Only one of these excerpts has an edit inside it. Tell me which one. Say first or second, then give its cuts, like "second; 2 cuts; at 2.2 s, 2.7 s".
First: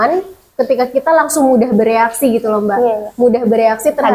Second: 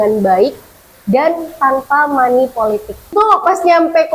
second; 1 cut; at 3.1 s